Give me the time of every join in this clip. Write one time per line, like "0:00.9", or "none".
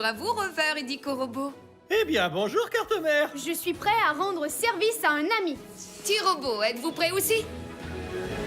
0:07.5